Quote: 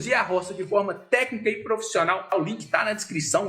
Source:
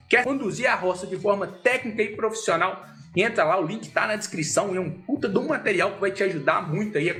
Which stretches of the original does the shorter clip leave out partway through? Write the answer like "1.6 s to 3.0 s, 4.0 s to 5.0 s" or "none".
2.8 s to 3.5 s